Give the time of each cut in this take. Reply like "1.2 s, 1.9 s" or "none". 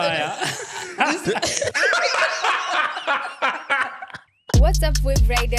4.3 s

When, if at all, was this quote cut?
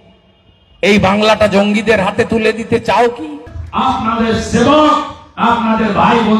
3.6 s

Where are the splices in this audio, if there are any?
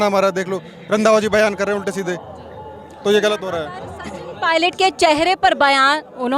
none

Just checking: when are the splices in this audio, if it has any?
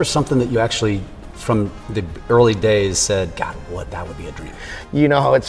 none

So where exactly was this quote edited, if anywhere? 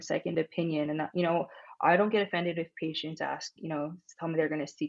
none

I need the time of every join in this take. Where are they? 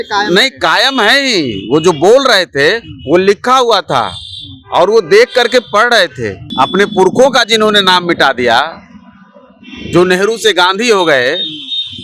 6.4 s

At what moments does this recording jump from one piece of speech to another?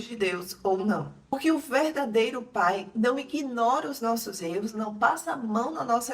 1.1 s

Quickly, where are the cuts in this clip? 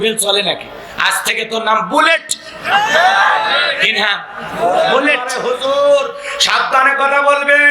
5.3 s

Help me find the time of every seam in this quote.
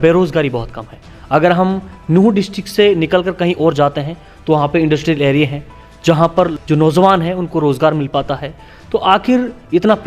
6.5 s

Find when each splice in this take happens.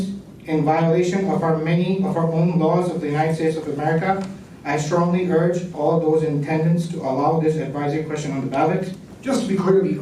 9.1 s

